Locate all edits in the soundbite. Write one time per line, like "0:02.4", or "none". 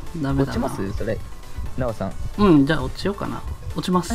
none

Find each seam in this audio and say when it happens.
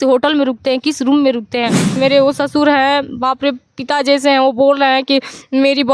0:02.0

